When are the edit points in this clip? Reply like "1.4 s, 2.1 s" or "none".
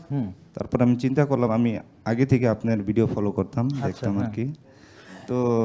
none